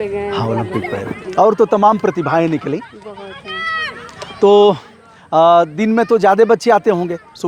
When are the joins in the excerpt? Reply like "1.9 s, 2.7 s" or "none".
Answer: none